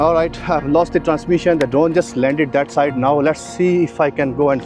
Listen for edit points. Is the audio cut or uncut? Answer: uncut